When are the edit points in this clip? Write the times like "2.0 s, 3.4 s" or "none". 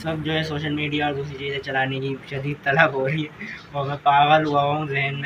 none